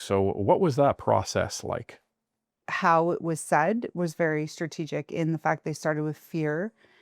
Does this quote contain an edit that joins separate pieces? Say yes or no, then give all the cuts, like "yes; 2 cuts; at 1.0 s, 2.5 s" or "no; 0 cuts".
yes; 1 cut; at 2.6 s